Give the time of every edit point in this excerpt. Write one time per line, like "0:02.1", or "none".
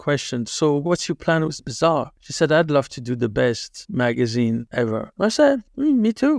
0:00.8
0:05.0